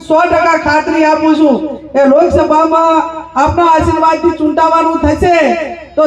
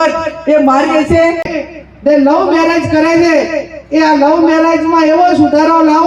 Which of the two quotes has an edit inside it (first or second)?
second